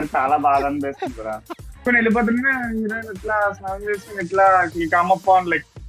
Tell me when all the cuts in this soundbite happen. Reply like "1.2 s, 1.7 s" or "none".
1.9 s